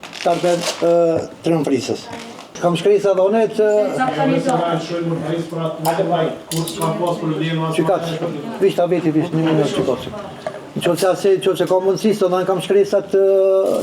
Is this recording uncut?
yes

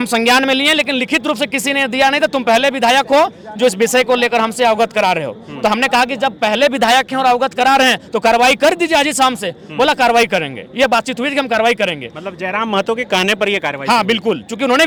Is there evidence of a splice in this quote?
no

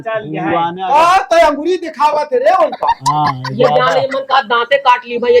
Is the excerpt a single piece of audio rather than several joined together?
yes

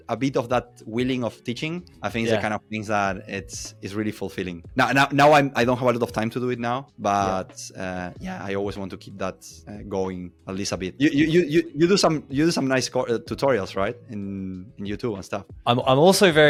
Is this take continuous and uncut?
yes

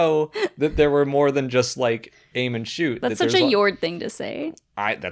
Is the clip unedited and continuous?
yes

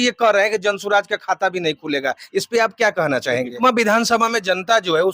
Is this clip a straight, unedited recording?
no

